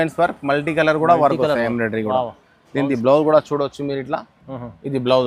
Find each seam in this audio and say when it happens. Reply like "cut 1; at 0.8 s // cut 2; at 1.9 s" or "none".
none